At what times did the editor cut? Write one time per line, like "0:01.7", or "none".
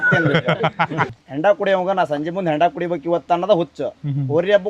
0:01.2